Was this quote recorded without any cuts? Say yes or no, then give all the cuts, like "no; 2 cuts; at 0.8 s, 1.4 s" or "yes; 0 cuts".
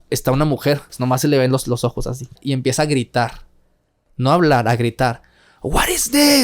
no; 2 cuts; at 1.0 s, 2.4 s